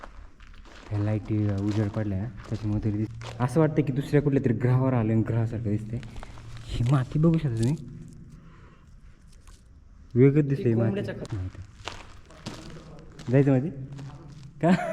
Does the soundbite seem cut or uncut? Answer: cut